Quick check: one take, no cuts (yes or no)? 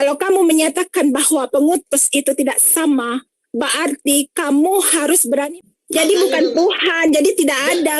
no